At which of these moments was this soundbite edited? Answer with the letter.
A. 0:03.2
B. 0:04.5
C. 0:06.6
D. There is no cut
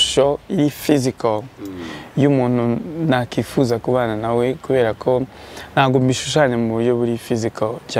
D